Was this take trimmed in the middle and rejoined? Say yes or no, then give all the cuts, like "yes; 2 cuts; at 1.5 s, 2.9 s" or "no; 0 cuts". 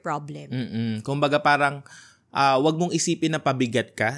no; 0 cuts